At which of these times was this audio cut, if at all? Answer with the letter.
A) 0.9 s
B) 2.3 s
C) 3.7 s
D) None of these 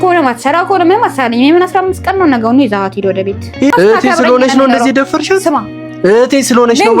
C